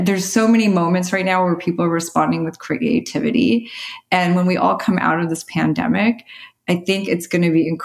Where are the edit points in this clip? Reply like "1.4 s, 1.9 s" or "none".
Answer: none

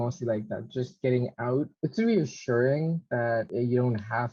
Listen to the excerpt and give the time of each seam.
1.7 s, 3.5 s

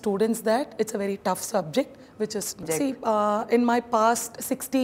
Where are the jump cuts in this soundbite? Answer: 2.6 s

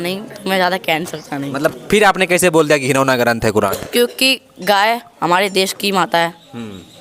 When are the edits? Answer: none

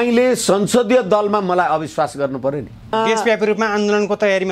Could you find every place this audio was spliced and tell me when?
2.9 s

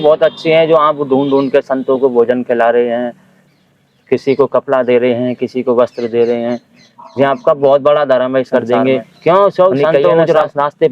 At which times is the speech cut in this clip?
8.5 s

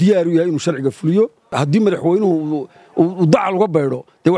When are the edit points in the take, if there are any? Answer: 1.5 s

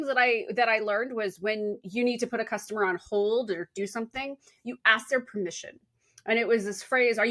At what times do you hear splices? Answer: none

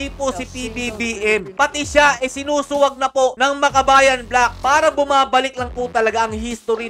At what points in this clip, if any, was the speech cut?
1.5 s, 4.6 s

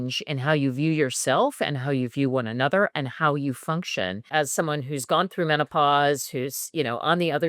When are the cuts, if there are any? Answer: 4.2 s

